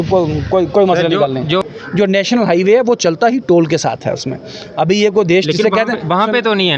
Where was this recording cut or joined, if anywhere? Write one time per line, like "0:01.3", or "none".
0:01.6